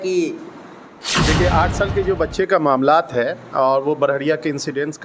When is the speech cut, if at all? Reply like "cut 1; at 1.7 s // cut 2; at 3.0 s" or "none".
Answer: cut 1; at 1.2 s